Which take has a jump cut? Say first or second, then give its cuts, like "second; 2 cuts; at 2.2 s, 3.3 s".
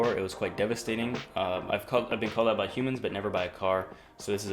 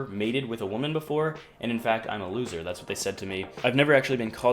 second; 1 cut; at 3.6 s